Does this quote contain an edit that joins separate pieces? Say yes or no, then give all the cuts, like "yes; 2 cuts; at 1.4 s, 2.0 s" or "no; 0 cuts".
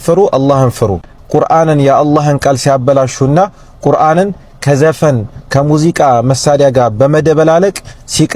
yes; 1 cut; at 1.1 s